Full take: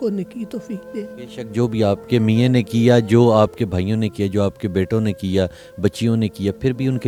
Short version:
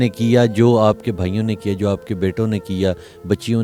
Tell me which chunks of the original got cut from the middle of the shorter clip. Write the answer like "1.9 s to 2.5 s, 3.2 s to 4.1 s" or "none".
none